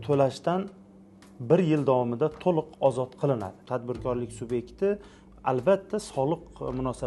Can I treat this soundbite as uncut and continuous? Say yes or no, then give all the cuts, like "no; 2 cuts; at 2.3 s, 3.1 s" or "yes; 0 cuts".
no; 1 cut; at 3.6 s